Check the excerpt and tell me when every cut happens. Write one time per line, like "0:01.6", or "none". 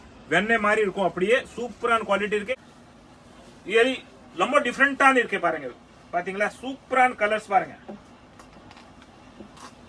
0:02.5